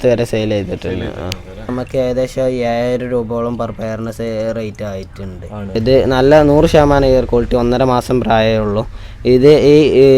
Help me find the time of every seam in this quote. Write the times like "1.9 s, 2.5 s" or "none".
1.7 s, 5.7 s